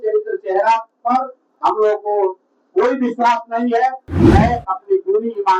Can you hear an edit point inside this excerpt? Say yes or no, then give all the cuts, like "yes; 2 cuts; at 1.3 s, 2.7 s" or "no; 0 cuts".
yes; 1 cut; at 4.1 s